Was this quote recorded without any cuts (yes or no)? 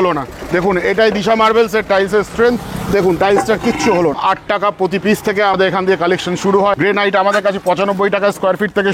no